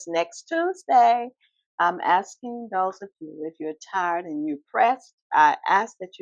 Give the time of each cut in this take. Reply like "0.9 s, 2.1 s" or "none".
none